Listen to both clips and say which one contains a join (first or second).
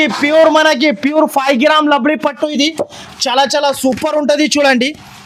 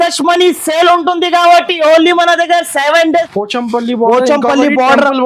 second